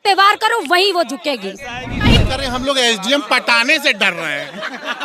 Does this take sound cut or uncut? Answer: cut